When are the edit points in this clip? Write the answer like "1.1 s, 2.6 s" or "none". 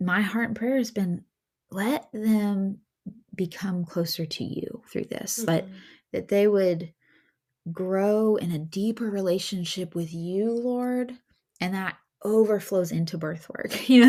none